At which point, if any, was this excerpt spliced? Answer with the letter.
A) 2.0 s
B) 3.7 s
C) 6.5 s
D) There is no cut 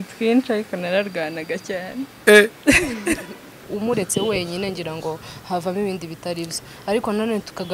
B